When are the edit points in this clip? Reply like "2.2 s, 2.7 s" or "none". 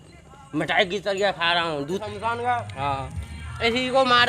2.0 s